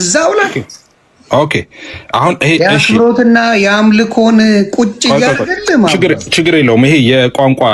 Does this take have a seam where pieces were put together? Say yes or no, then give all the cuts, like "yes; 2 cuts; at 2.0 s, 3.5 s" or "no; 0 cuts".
no; 0 cuts